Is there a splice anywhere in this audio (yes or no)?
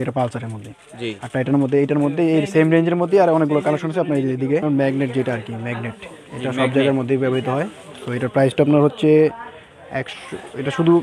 yes